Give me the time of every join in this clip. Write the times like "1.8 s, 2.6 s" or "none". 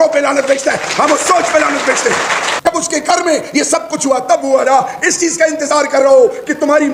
2.5 s